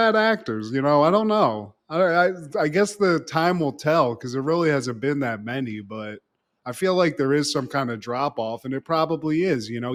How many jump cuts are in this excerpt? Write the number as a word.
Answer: zero